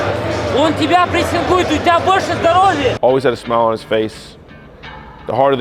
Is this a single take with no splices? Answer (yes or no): no